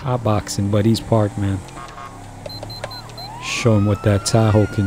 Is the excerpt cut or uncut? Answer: cut